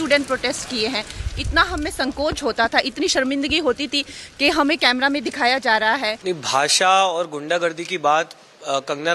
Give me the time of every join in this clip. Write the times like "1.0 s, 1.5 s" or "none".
6.1 s